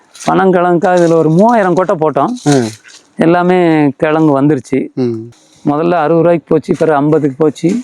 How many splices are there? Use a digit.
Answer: 1